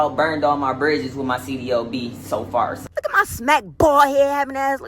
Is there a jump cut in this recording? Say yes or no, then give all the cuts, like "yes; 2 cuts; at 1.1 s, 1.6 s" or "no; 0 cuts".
yes; 1 cut; at 2.8 s